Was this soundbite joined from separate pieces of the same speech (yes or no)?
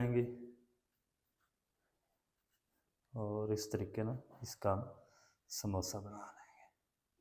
no